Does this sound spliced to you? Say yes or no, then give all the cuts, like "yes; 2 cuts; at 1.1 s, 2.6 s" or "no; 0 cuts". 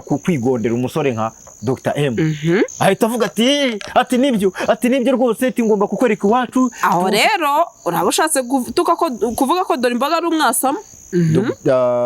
yes; 2 cuts; at 2.7 s, 11.1 s